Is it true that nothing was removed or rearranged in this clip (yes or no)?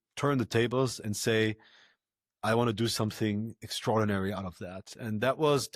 yes